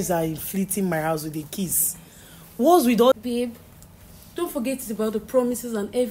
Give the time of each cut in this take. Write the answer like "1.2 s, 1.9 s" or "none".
3.2 s